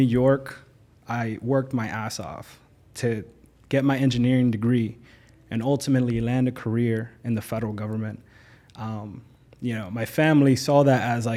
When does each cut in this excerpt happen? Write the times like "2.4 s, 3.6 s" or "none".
none